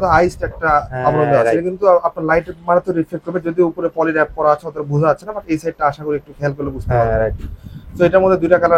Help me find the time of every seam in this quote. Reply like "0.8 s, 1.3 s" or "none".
none